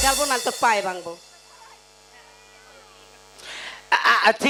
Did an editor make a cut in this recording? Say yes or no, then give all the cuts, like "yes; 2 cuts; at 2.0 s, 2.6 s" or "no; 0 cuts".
no; 0 cuts